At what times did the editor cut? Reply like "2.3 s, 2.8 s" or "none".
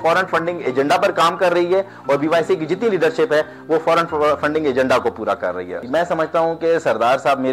none